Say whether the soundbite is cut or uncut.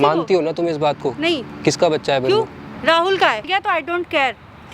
cut